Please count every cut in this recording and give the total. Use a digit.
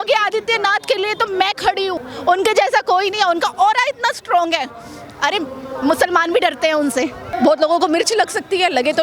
2